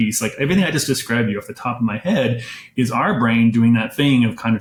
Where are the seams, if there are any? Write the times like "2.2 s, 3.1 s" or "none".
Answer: none